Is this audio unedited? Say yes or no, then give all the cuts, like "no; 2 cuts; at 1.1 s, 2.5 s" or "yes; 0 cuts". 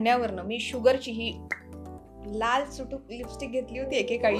yes; 0 cuts